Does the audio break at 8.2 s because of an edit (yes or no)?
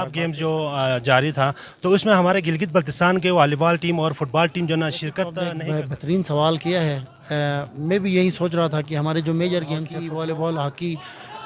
no